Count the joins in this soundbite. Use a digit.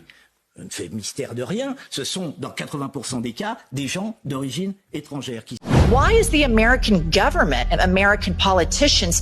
1